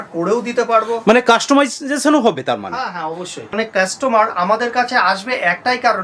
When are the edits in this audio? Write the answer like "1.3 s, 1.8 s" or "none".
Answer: 3.5 s